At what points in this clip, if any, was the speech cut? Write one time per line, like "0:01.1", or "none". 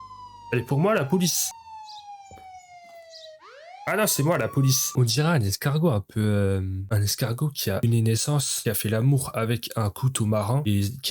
0:01.5
0:04.9

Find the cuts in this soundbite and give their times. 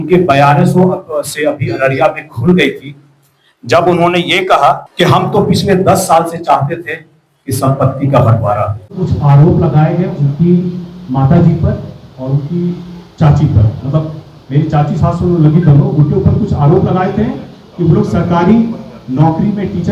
0:08.8

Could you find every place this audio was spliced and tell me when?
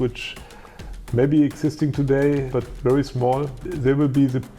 0:02.5
0:03.6

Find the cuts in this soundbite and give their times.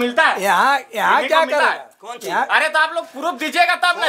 none

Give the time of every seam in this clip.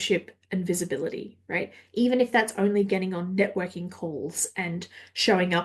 none

